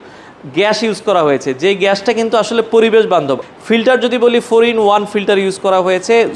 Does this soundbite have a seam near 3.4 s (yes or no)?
yes